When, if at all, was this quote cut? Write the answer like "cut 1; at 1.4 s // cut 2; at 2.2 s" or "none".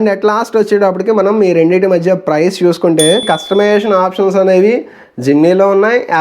cut 1; at 3.2 s